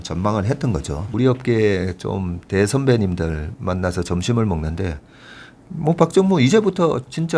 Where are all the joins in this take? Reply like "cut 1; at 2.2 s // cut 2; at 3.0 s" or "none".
cut 1; at 1.0 s